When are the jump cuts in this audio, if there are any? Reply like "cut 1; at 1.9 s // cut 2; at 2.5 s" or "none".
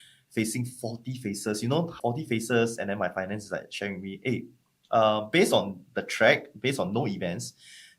cut 1; at 1.9 s